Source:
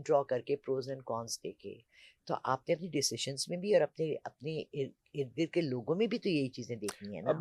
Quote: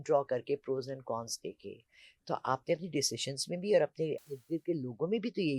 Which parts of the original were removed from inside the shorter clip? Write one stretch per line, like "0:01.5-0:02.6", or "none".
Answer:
0:04.3-0:05.2